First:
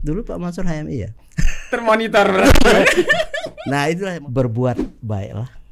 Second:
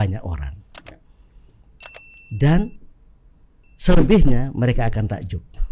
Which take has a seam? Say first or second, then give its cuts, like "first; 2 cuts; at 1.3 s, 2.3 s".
first; 1 cut; at 4.1 s